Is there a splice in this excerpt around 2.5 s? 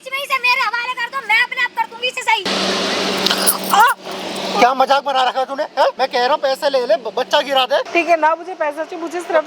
yes; 3 cuts; at 2.5 s, 6.0 s, 7.9 s

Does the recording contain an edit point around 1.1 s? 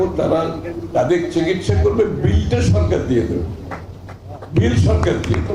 no; 0 cuts

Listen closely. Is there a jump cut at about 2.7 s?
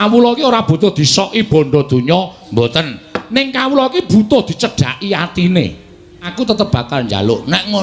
no; 1 cut; at 6.2 s

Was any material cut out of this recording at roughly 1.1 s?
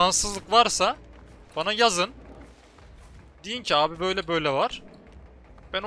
no; 0 cuts

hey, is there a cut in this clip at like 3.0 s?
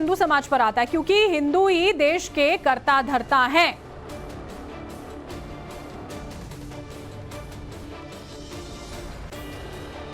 no; 1 cut; at 1.7 s

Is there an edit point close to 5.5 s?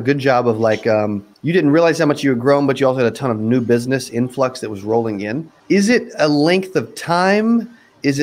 yes; 2 cuts; at 1.3 s, 5.5 s

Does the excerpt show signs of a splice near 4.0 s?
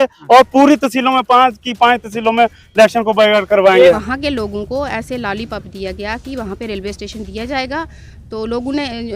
yes; 1 cut; at 4.0 s

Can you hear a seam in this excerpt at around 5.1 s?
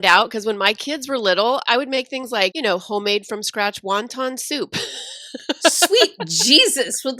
no; 2 cuts; at 1.6 s, 2.5 s

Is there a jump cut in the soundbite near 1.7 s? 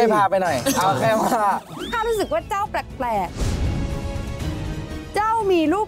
yes; 1 cut; at 1.7 s

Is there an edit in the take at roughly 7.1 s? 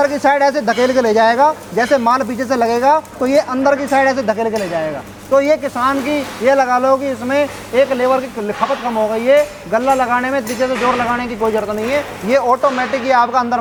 no; 0 cuts

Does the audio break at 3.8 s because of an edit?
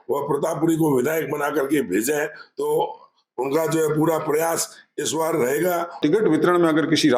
no; 1 cut; at 6.0 s

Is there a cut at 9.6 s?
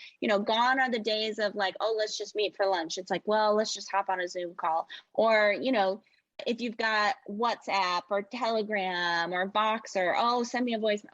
no; 1 cut; at 6.4 s

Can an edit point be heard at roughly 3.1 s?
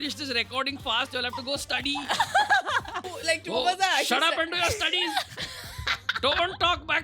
yes; 1 cut; at 3.1 s

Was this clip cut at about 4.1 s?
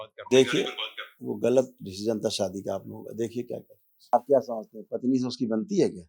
yes; 1 cut; at 4.1 s

